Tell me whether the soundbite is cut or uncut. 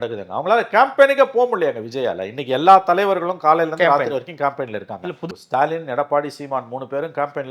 cut